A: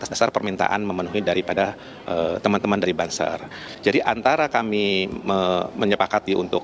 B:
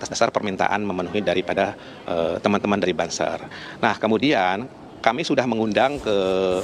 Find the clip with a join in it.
A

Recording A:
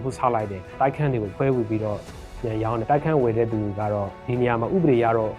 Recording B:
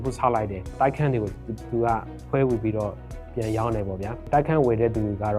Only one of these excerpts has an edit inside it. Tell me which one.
A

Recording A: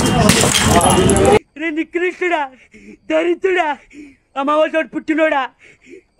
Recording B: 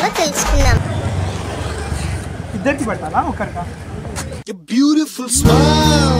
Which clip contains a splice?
A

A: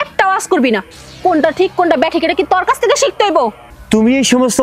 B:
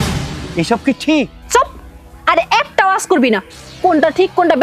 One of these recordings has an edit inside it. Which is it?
A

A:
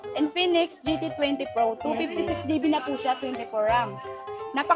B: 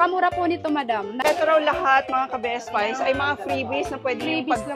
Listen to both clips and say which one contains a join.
B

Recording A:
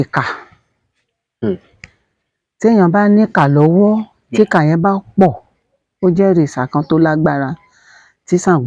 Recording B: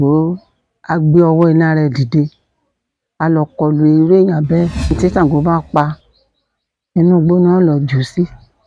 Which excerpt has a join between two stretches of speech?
B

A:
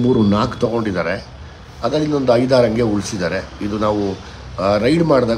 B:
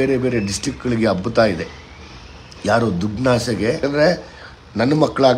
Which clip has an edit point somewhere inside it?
B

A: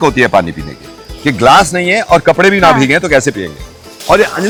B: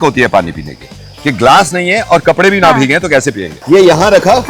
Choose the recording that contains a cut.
B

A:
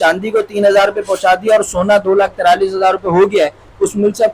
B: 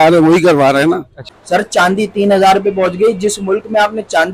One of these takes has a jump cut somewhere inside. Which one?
B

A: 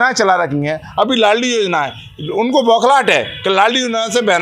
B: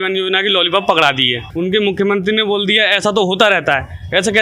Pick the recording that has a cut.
B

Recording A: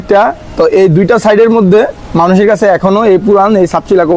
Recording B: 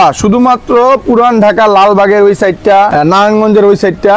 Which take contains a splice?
B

